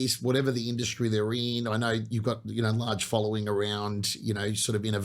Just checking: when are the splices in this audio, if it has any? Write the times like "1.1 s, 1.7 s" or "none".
none